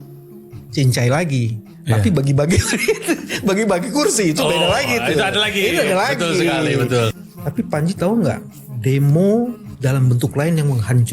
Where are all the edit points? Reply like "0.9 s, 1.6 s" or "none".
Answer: 7.2 s, 9.7 s